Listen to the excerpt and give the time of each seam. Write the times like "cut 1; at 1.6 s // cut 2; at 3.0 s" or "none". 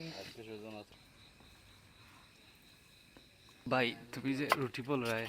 cut 1; at 0.9 s // cut 2; at 3.7 s